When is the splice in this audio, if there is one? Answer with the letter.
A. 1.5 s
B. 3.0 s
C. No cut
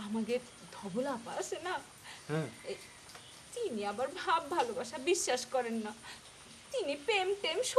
C